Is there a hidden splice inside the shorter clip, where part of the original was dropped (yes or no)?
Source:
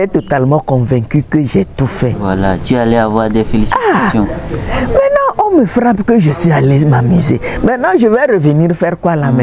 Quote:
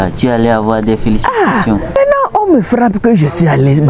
yes